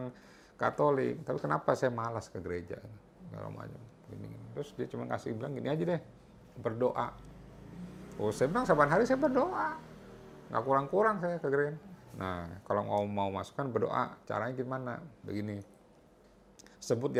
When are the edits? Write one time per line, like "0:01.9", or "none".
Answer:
none